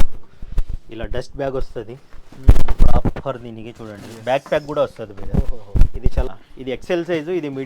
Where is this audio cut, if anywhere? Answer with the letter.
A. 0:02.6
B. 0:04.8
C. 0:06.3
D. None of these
C